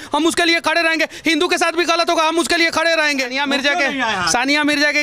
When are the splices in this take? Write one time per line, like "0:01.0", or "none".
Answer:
0:03.3